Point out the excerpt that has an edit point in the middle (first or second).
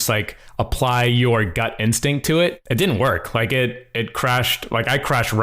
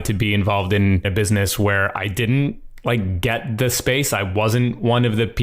second